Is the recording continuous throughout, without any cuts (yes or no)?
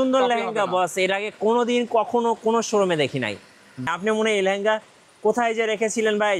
no